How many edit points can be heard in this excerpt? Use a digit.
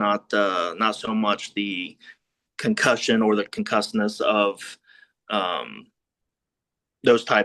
0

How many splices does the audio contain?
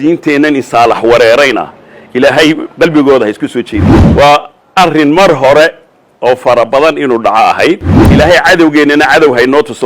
2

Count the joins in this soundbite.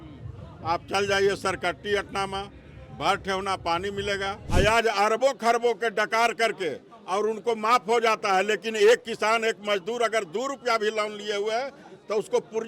1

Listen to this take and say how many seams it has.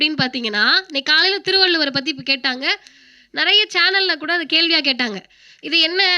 0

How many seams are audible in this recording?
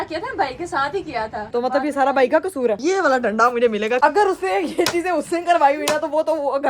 3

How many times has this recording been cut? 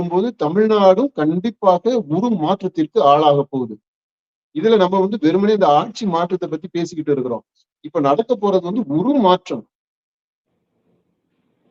0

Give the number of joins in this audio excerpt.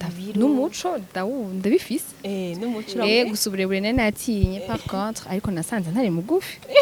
0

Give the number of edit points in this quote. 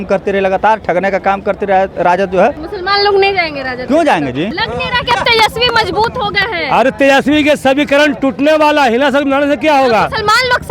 2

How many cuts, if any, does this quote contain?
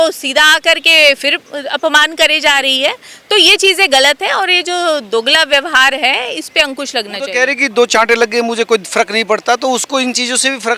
0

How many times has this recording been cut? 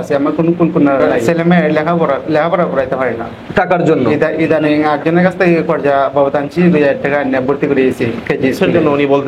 2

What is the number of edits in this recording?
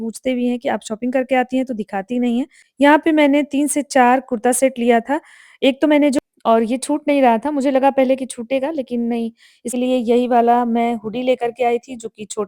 3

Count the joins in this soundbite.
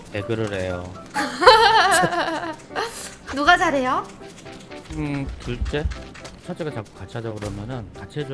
0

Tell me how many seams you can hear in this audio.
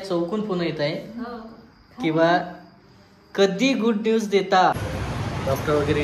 1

